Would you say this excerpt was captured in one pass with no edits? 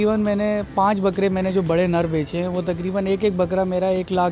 yes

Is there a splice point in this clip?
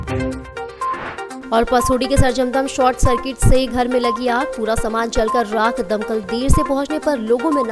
yes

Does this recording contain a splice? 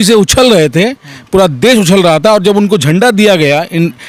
no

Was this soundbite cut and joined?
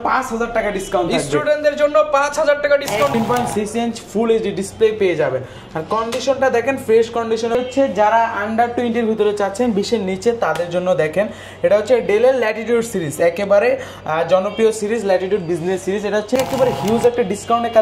yes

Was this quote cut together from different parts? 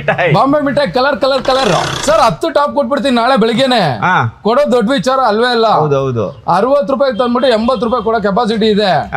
yes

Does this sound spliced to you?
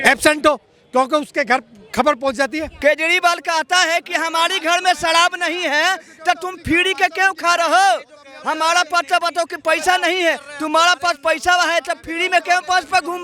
yes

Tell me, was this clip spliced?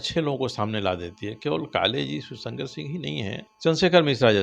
yes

